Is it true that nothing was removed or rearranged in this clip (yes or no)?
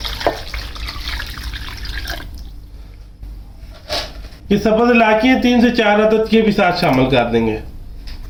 yes